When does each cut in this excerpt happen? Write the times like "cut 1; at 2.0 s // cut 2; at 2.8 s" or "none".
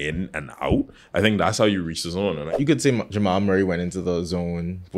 cut 1; at 2.5 s